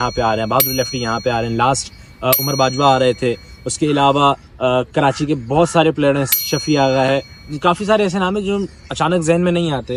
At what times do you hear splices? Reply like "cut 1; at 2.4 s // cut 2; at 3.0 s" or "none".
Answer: none